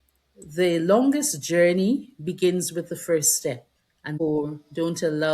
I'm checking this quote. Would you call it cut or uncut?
cut